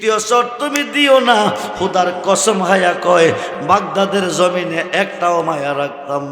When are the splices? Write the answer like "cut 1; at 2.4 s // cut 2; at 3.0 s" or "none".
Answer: cut 1; at 3.5 s